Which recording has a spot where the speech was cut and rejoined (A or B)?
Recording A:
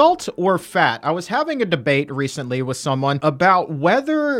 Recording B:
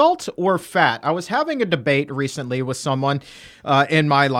A